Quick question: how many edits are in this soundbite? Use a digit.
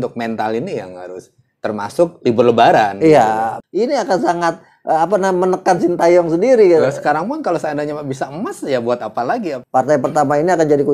2